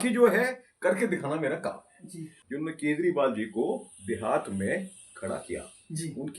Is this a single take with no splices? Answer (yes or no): no